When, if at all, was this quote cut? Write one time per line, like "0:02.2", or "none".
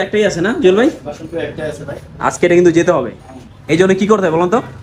none

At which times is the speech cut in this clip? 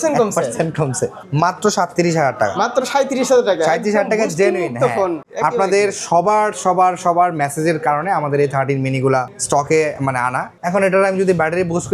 0:01.2
0:05.2
0:09.4
0:10.5

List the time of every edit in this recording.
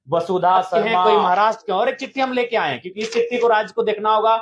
0:01.1

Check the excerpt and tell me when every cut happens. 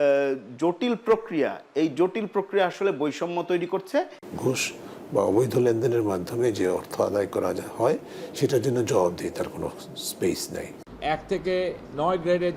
0:04.3
0:10.8

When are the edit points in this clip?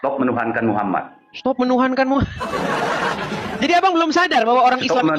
0:03.1

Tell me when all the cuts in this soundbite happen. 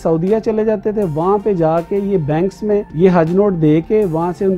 0:02.9

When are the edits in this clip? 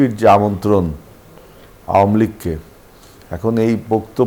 none

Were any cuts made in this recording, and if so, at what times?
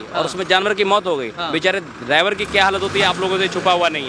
none

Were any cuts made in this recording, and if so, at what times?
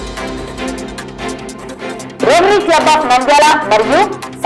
0:01.2
0:02.1

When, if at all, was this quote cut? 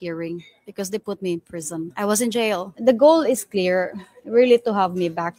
0:01.9
0:02.7

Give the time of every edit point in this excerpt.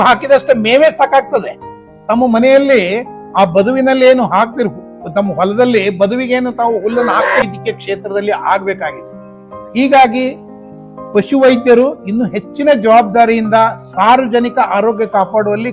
0:07.4

